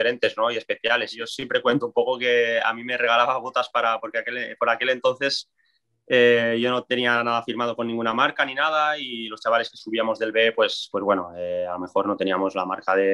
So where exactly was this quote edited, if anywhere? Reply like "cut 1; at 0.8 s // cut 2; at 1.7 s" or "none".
cut 1; at 1.2 s